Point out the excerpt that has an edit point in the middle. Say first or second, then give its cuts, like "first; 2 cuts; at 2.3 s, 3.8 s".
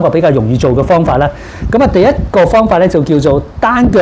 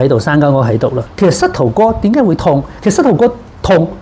second; 1 cut; at 1.0 s